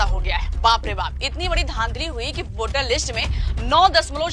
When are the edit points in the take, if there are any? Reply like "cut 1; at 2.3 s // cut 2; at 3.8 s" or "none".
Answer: none